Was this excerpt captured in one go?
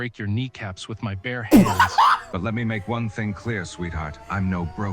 no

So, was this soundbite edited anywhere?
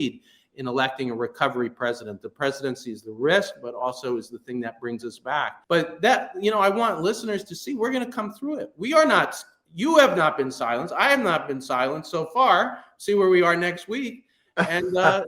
yes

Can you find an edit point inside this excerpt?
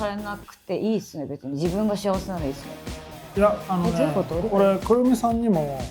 no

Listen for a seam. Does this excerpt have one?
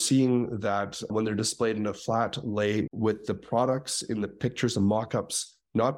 yes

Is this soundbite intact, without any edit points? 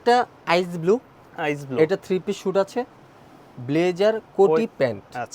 yes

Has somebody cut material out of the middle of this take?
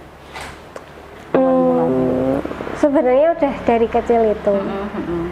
no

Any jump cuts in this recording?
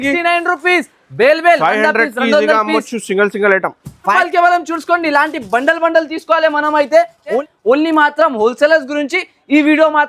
yes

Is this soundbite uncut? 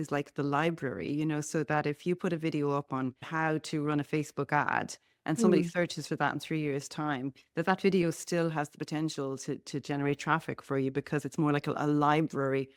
yes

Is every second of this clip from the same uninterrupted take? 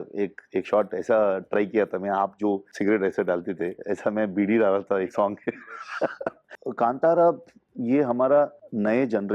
no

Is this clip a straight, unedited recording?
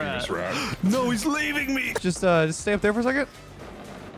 no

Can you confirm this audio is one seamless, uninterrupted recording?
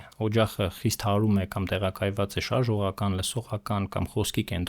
yes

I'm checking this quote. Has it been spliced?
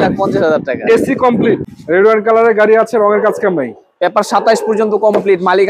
yes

